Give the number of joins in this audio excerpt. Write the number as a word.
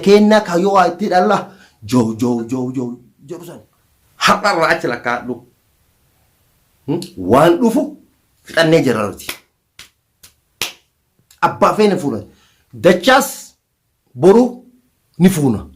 one